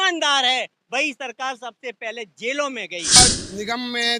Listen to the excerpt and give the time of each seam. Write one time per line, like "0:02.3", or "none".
0:03.2

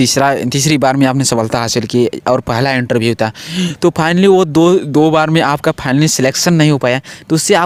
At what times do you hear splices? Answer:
none

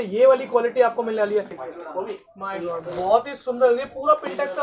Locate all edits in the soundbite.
0:01.6

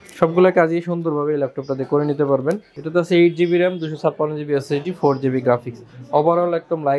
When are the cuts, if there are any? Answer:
0:02.7

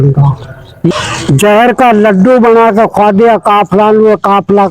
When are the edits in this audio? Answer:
0:00.9

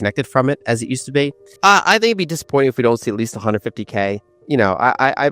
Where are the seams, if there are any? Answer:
0:01.4
0:04.3

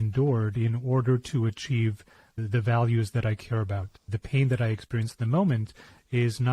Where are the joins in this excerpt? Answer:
0:02.4
0:04.0

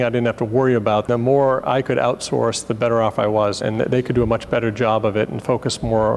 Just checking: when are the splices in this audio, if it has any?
0:01.1
0:03.6

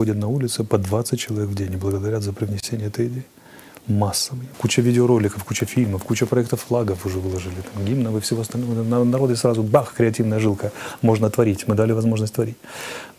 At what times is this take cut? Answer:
0:04.3

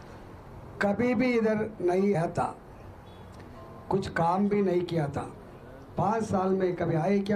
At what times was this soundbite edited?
0:02.2

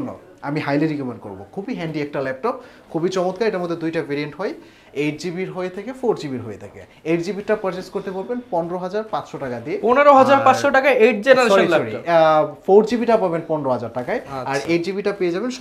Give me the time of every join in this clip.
none

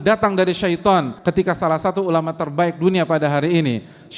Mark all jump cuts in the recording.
0:01.1

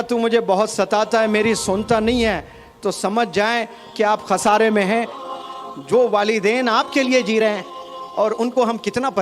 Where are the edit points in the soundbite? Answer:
0:05.2

